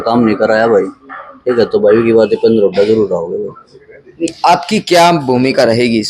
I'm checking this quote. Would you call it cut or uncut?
uncut